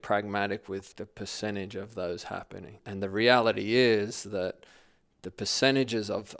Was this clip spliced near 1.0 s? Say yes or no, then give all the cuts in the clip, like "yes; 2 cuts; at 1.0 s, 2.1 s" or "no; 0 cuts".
yes; 2 cuts; at 1.0 s, 2.8 s